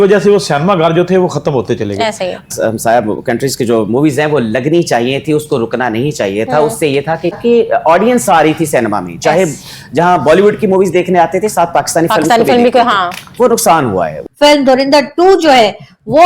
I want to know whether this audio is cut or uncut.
cut